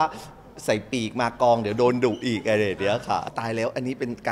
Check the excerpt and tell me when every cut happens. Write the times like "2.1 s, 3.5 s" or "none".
3.3 s

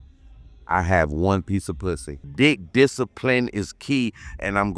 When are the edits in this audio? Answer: 2.3 s

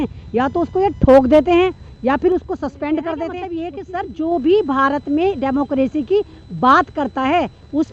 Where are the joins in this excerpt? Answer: 3.7 s

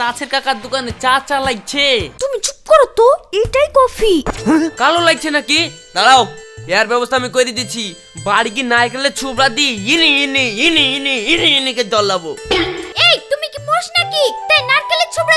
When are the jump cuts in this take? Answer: 2.1 s, 4.3 s

